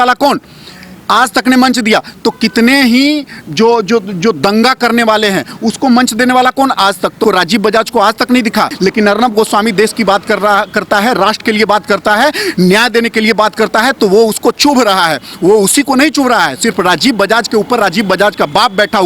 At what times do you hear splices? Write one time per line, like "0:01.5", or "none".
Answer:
0:07.2
0:08.7